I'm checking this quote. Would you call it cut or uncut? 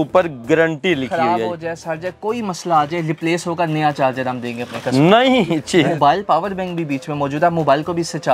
cut